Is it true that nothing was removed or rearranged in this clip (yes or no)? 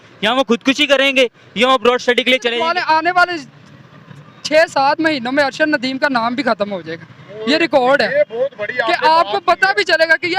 no